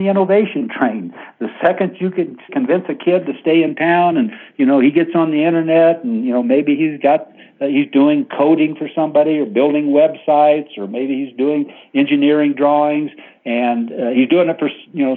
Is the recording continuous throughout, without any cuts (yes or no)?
yes